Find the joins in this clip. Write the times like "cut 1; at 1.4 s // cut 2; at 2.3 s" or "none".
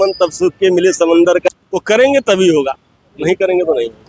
cut 1; at 1.4 s